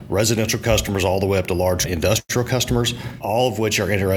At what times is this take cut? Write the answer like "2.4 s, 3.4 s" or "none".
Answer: 1.9 s, 3.1 s